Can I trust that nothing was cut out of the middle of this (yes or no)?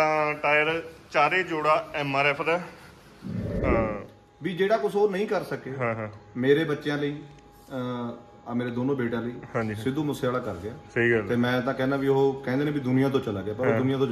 no